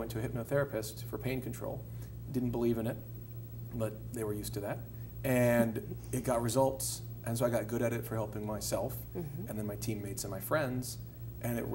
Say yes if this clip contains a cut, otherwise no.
no